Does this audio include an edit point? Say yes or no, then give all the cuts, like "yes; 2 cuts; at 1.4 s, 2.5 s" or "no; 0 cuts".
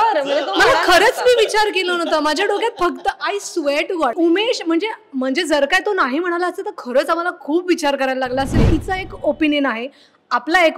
yes; 2 cuts; at 4.1 s, 8.7 s